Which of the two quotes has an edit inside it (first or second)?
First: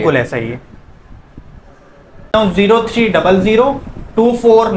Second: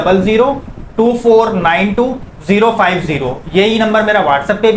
first